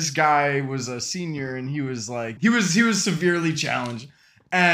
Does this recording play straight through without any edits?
no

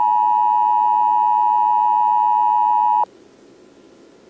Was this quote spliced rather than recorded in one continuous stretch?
yes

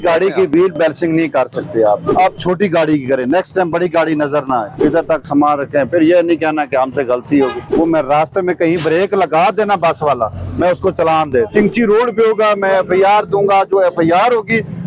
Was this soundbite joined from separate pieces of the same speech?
yes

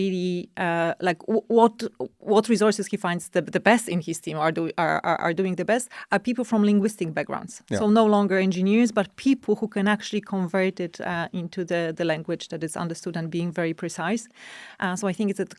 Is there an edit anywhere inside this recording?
no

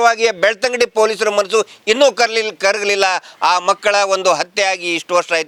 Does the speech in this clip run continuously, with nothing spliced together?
yes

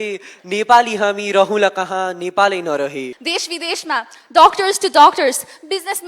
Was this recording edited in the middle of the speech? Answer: yes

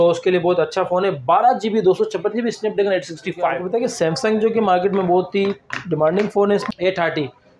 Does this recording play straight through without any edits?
no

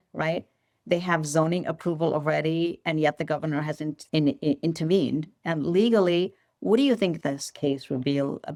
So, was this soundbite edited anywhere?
no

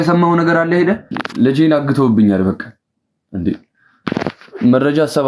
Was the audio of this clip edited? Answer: yes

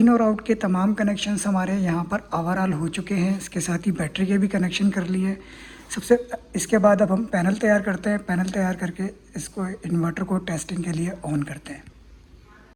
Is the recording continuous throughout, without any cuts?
yes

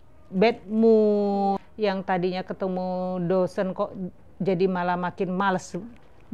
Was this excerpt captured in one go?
no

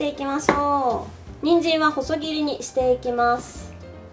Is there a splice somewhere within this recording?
no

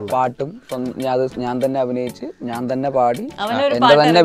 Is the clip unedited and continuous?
yes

